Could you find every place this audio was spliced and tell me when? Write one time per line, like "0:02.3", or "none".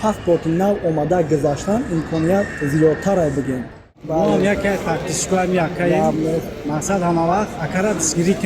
0:04.0

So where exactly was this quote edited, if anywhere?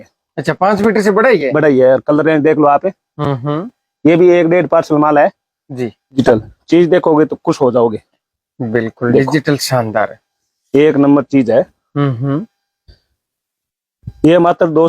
0:06.2

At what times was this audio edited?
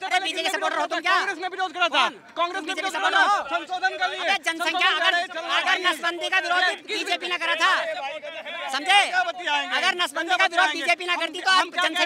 none

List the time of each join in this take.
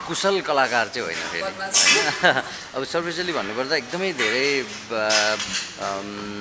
none

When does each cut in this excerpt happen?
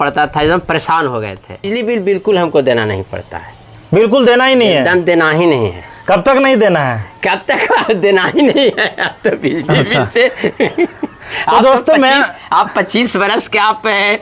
0:01.7

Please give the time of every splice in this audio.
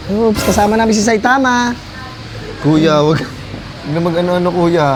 none

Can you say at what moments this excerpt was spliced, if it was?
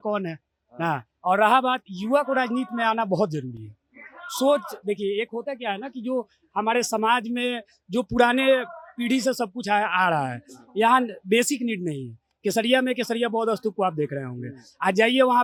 none

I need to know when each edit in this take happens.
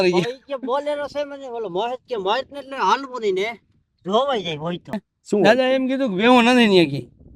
0:05.0

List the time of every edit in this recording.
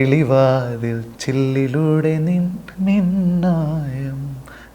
0:01.1
0:02.6

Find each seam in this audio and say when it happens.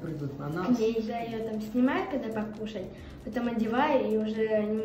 0:01.1

